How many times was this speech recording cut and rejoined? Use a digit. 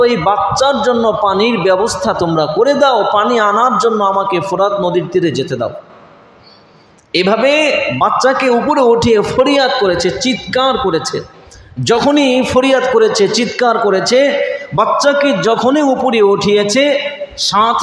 0